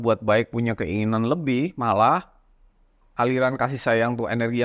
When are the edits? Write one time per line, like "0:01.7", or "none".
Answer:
none